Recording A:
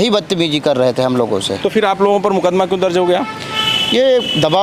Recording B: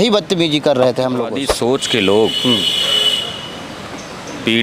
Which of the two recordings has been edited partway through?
B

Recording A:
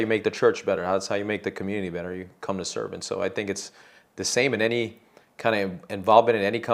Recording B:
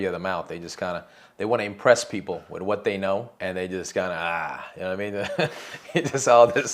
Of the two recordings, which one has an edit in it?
B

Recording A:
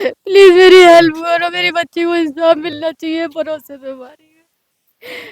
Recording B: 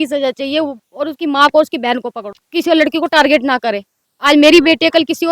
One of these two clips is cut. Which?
B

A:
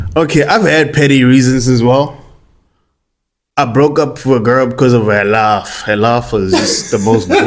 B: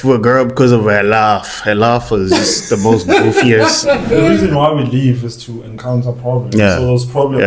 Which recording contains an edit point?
B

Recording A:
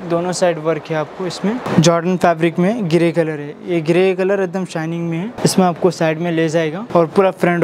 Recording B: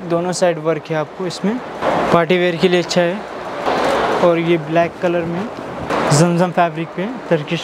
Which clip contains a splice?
A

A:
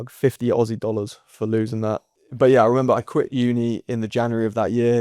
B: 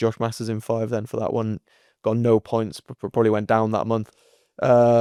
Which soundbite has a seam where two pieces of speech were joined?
A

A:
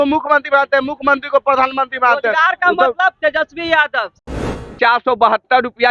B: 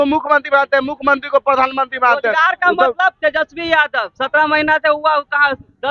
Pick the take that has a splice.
A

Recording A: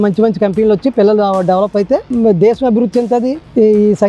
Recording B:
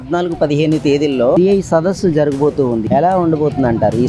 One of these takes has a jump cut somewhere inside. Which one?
B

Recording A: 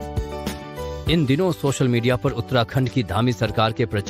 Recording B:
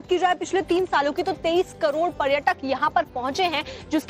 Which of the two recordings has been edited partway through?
A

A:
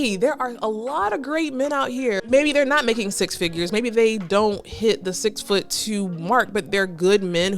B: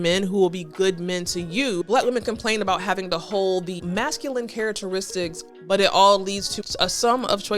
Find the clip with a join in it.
B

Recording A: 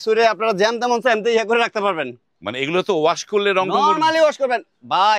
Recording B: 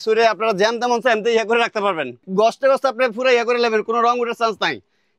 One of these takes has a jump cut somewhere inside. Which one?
B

